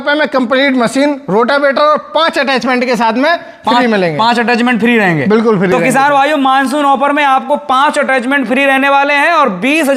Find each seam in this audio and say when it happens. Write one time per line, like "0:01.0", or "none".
none